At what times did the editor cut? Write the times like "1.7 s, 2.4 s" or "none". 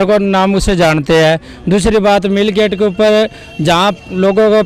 none